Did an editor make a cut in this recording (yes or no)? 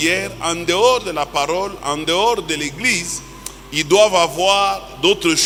no